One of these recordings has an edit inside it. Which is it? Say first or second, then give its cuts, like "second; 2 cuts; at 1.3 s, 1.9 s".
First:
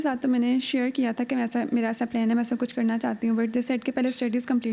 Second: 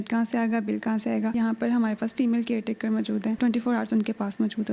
second; 2 cuts; at 1.3 s, 3.4 s